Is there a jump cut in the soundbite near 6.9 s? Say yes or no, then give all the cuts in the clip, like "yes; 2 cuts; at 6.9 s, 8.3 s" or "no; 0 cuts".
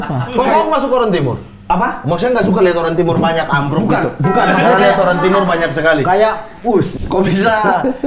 yes; 1 cut; at 6.9 s